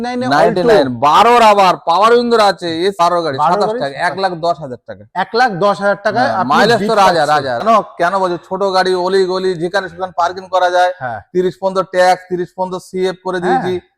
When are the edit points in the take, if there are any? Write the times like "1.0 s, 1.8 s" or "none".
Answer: 3.0 s, 7.6 s